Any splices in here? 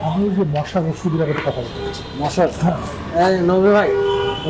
no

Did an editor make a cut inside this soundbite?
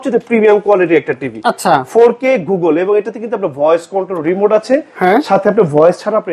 no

